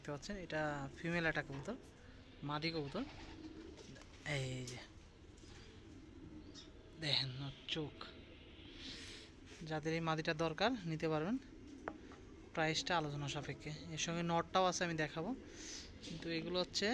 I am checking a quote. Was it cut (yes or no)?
no